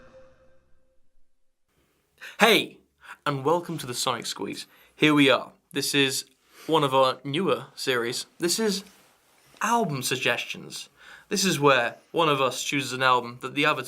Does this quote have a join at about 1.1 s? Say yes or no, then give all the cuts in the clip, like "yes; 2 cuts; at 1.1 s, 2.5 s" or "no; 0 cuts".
no; 1 cut; at 10.0 s